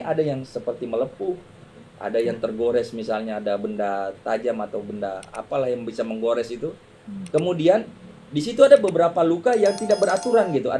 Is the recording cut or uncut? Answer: uncut